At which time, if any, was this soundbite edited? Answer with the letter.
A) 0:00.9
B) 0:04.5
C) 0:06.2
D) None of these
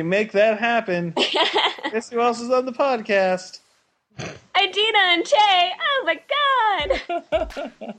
D